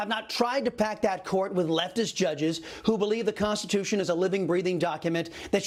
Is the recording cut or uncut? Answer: uncut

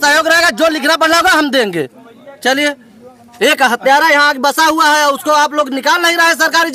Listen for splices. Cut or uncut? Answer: uncut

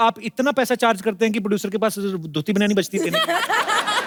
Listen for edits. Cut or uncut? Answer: uncut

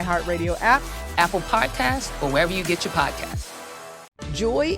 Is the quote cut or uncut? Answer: cut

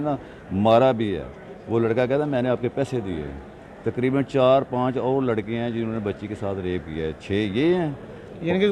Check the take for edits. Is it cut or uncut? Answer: uncut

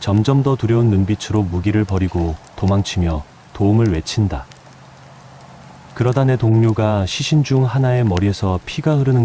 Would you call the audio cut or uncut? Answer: cut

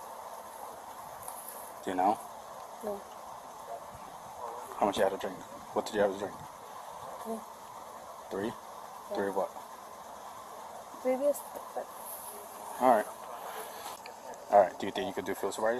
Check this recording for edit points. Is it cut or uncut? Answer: cut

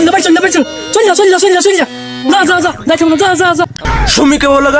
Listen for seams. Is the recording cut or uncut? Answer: cut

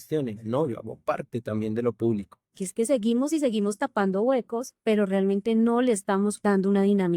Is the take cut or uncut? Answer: cut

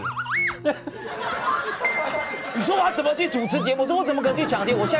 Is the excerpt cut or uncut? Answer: uncut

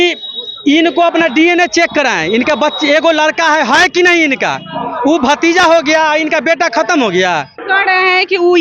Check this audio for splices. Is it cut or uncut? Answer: cut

